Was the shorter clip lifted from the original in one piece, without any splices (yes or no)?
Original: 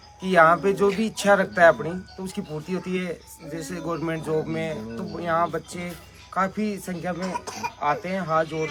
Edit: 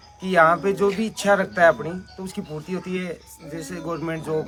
yes